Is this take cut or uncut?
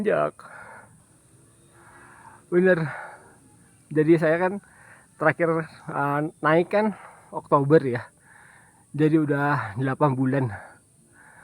cut